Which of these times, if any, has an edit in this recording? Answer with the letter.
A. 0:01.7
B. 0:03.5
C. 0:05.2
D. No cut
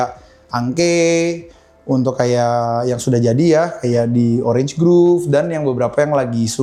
D